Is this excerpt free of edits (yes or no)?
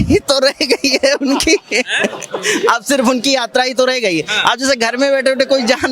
yes